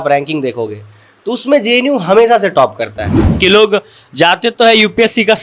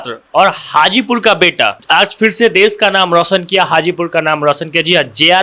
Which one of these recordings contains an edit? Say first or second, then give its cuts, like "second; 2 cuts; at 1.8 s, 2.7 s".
first; 1 cut; at 3.4 s